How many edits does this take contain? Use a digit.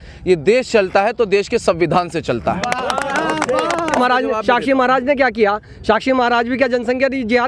1